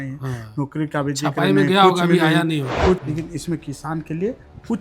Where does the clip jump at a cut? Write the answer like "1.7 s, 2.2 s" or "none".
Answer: 3.0 s